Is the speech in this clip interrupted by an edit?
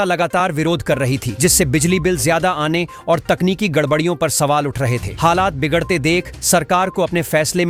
no; 0 cuts

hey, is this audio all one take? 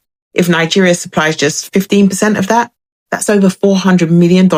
yes; 0 cuts

